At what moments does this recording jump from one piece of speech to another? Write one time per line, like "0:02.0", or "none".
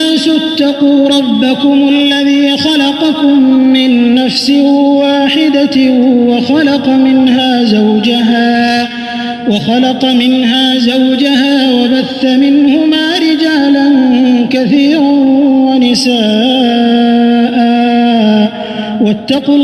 0:02.9